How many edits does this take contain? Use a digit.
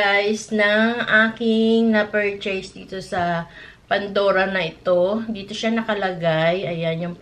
0